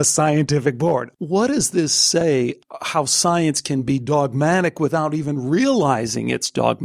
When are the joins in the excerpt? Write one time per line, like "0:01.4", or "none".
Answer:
0:01.1
0:02.6